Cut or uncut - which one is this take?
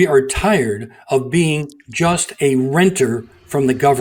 uncut